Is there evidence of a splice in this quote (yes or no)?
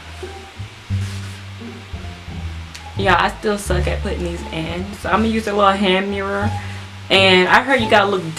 no